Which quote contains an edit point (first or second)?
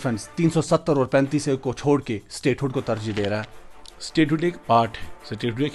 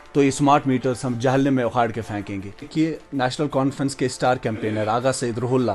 second